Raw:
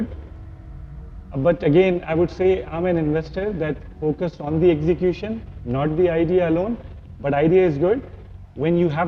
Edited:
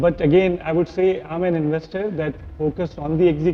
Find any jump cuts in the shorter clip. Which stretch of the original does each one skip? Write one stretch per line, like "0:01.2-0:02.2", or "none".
none